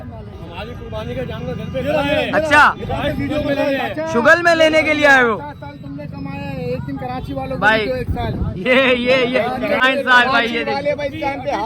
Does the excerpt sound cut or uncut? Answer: cut